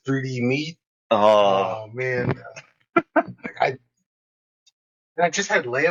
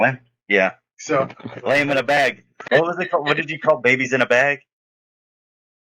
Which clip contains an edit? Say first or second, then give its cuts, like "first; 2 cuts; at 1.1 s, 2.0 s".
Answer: second; 1 cut; at 2.6 s